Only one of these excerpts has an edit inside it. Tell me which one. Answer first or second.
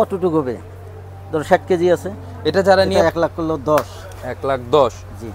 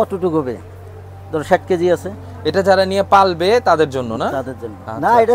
first